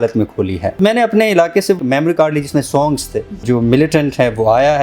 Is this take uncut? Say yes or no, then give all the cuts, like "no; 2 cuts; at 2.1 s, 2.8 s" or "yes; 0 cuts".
no; 3 cuts; at 0.8 s, 1.8 s, 3.4 s